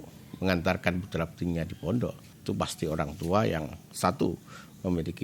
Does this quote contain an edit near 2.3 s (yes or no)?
yes